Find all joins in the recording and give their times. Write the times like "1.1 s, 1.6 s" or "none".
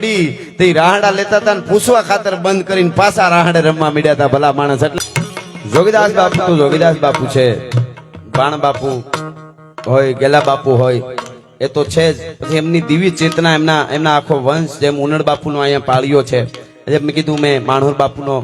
4.9 s